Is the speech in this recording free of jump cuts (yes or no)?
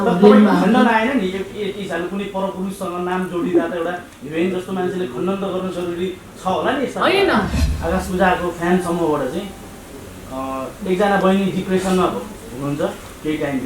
no